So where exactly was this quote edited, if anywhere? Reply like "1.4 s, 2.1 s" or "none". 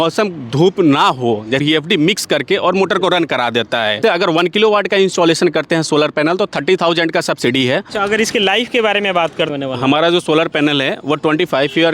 1.6 s, 4.0 s, 7.9 s, 9.5 s

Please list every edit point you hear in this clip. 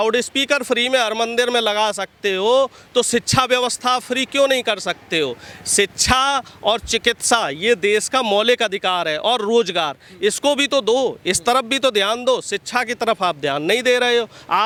none

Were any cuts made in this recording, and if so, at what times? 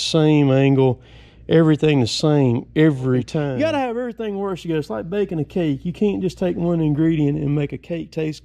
3.5 s

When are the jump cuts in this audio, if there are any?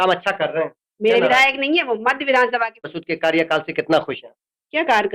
2.9 s

